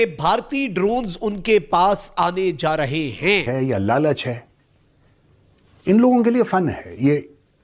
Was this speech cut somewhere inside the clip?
yes; 1 cut; at 3.4 s

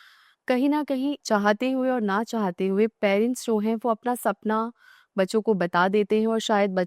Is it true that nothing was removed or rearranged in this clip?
no; 1 cut; at 1.2 s

